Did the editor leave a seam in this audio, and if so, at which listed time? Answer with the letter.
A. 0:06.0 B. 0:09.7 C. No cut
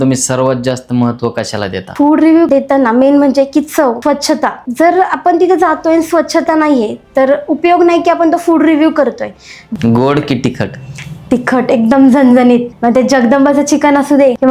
B